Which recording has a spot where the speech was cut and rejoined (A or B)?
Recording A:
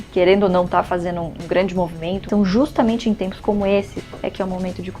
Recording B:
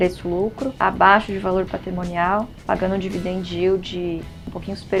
A